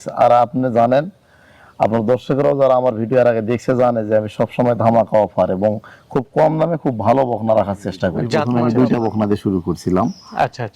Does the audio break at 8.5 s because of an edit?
yes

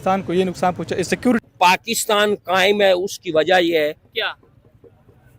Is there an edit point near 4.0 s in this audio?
no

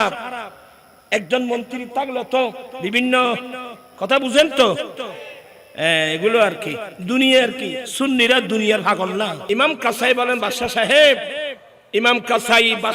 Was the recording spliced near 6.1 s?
no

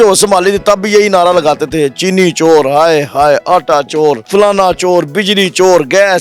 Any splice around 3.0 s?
no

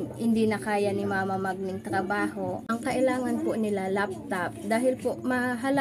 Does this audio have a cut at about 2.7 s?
yes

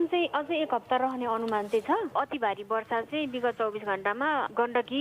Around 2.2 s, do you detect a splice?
yes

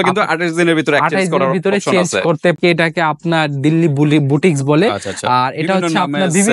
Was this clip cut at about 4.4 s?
no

